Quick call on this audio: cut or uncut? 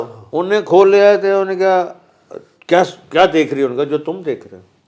uncut